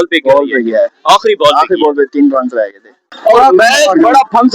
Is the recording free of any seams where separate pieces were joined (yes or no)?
no